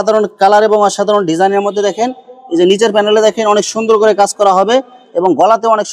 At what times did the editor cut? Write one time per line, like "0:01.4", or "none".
none